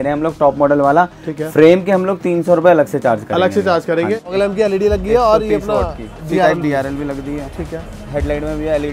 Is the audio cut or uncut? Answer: cut